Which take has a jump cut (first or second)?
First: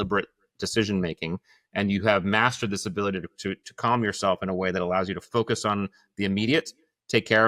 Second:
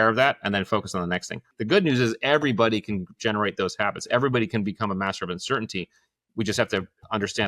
second